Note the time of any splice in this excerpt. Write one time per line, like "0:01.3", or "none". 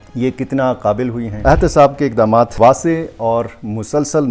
0:01.4